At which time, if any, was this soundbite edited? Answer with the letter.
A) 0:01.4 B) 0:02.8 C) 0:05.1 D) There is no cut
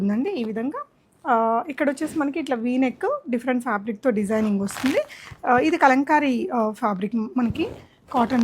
D